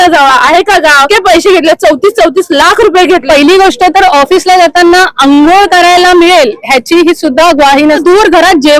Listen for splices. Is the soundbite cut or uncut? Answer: cut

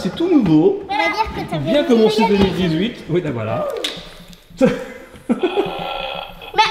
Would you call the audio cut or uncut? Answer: uncut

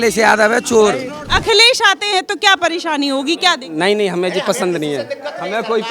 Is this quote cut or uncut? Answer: cut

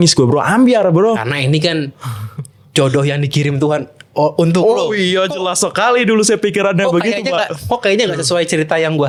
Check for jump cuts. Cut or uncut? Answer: uncut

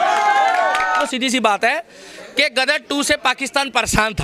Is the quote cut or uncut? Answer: uncut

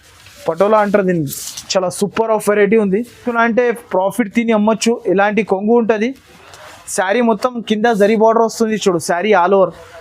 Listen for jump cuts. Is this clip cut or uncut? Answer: cut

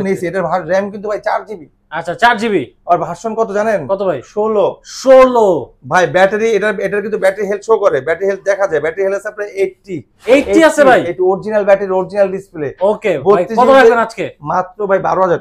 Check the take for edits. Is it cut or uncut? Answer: uncut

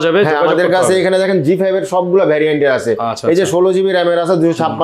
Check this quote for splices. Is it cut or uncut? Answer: uncut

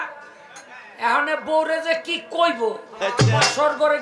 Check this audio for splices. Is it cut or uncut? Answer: uncut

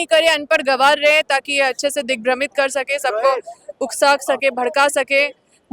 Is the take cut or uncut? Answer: uncut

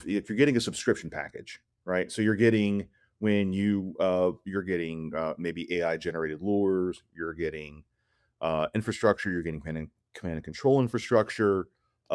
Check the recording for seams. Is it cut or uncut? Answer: uncut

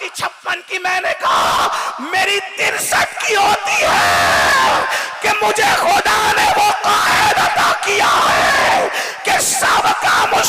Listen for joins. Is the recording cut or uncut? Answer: uncut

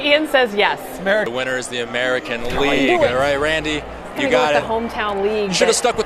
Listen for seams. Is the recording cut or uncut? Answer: cut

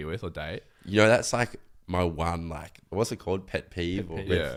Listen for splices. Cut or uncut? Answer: uncut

